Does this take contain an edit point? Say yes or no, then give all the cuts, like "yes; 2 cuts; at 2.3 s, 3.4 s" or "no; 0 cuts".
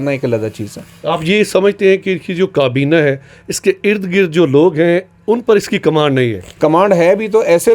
yes; 1 cut; at 6.4 s